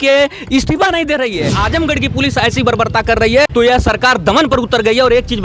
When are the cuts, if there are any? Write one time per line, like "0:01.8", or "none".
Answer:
0:01.6
0:03.5